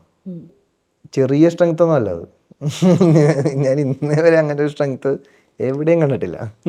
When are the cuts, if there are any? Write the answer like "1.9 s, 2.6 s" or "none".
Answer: none